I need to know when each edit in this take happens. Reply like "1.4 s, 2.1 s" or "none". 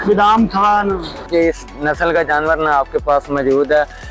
1.3 s